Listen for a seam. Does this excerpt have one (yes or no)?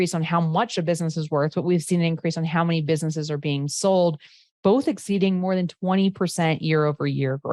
no